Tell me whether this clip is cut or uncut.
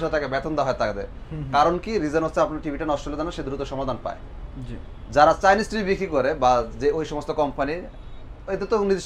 uncut